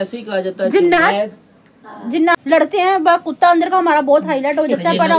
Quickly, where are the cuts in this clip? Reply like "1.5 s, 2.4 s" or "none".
2.3 s